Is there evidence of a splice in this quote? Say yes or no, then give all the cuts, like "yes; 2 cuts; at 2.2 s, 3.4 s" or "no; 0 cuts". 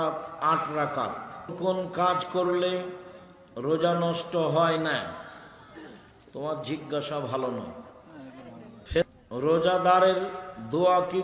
yes; 2 cuts; at 1.5 s, 9.0 s